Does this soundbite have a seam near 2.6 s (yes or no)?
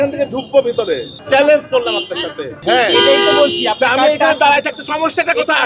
yes